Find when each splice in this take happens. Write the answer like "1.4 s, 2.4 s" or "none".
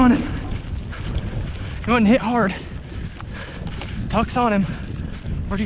none